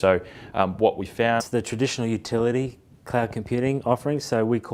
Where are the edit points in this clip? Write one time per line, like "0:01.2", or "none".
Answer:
none